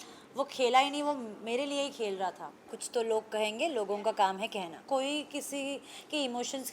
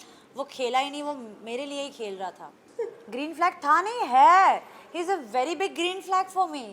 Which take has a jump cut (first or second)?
first